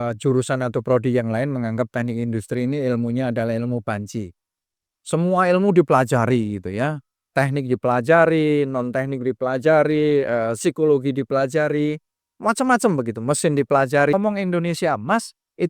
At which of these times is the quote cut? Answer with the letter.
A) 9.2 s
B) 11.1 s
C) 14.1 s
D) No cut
C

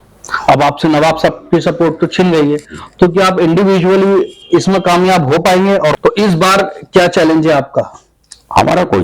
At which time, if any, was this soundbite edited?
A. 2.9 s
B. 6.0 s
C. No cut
B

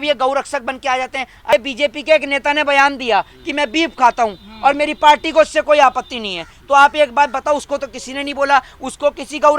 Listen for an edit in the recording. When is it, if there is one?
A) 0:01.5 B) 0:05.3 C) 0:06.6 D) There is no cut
A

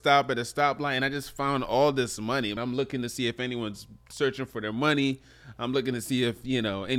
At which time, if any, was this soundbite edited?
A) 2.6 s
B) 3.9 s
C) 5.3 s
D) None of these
A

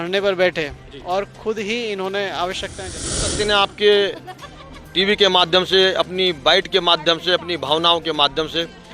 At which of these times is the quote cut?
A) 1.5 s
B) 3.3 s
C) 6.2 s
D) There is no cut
B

